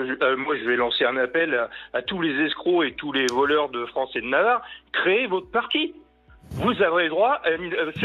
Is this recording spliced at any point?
no; 0 cuts

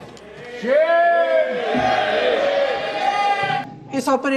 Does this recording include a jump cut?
yes; 1 cut; at 3.4 s

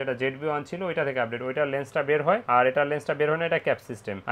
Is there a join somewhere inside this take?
no; 0 cuts

